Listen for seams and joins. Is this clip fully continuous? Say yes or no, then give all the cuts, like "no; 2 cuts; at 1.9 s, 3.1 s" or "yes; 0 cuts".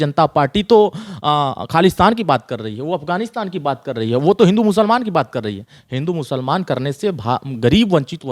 yes; 0 cuts